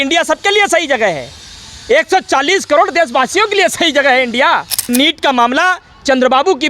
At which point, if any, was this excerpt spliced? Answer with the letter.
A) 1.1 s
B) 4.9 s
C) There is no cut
B